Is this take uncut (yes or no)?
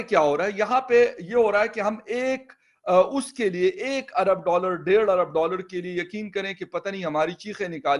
yes